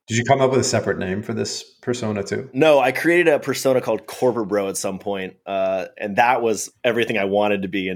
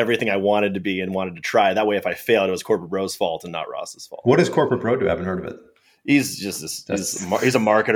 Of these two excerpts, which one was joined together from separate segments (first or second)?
first